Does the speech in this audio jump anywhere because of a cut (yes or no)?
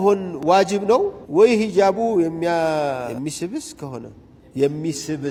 no